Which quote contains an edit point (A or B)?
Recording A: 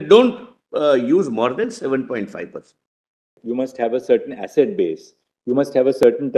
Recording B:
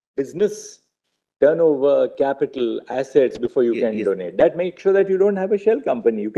A